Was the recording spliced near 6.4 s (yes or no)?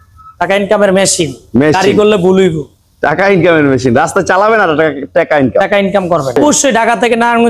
yes